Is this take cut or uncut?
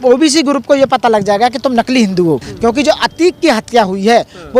cut